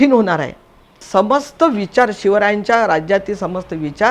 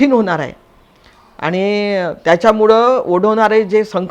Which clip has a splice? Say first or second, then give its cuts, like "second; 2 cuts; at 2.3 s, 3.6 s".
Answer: first; 1 cut; at 1.0 s